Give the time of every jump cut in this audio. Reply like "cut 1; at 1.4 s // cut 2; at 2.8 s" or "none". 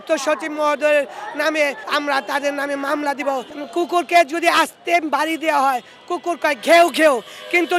cut 1; at 1.8 s // cut 2; at 3.5 s